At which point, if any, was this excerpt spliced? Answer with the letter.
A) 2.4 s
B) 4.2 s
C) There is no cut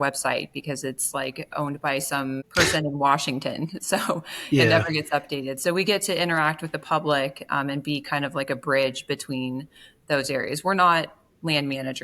A